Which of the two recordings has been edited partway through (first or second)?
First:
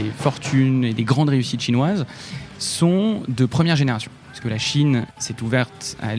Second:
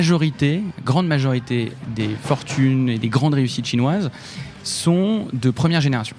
first